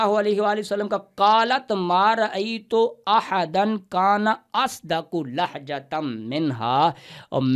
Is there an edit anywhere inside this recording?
no; 0 cuts

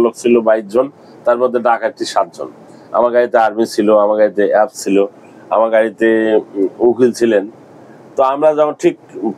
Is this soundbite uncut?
yes; 0 cuts

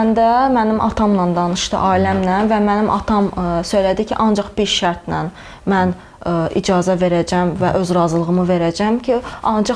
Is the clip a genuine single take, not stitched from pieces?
yes; 0 cuts

